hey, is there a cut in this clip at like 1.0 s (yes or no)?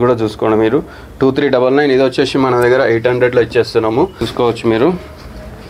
no